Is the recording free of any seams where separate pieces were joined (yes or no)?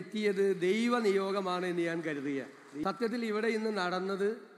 no